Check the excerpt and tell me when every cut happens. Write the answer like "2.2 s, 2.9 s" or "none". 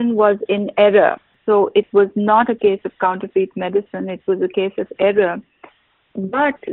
none